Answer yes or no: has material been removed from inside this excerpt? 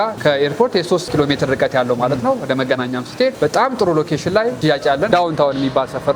yes